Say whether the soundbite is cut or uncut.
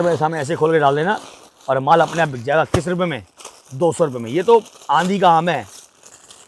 uncut